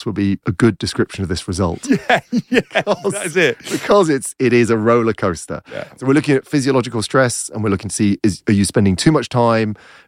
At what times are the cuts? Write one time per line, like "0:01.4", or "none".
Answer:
none